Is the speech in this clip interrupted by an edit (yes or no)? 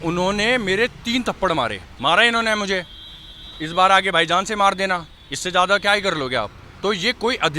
yes